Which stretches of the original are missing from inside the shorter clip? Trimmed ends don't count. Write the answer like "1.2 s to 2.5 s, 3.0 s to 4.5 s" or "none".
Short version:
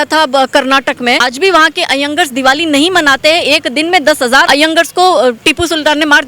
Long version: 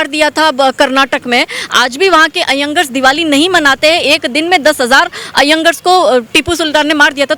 1.5 s to 1.8 s, 5.1 s to 5.4 s